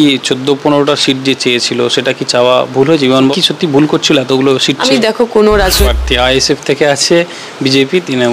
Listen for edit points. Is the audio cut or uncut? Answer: cut